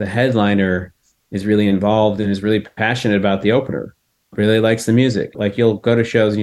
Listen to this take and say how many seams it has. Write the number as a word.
two